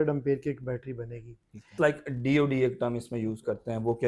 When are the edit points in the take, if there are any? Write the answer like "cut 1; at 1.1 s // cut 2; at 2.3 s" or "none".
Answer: cut 1; at 1.7 s